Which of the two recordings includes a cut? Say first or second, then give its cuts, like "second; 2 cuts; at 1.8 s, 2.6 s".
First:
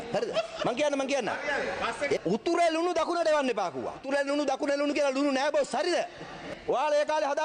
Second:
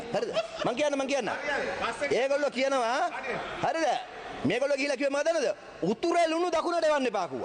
first; 3 cuts; at 2.2 s, 4.0 s, 6.4 s